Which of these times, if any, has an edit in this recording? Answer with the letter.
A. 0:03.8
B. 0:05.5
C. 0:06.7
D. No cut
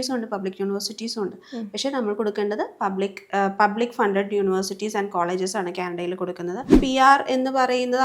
C